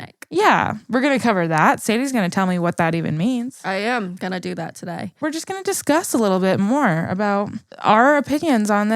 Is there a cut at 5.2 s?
yes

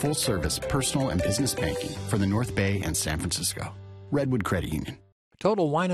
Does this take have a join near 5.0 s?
yes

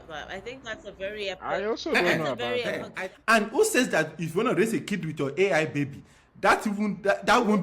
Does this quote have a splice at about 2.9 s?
yes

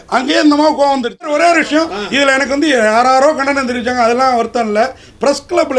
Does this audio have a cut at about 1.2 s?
yes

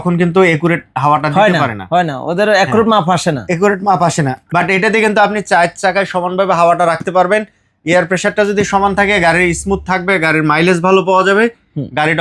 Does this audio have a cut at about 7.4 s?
no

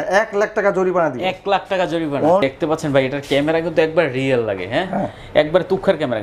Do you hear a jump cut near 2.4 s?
yes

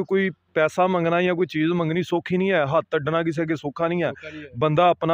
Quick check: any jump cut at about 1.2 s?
no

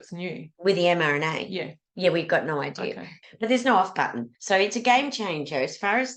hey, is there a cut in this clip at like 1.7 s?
no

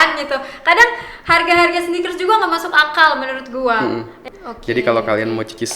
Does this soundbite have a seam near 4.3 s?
yes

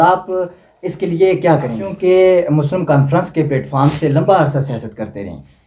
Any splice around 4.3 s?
no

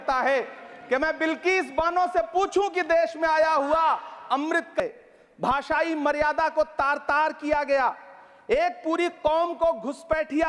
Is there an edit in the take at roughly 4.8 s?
yes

